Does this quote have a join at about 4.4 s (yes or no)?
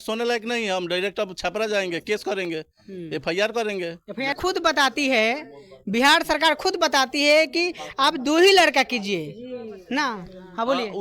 yes